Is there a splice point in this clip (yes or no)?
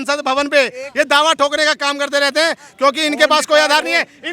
no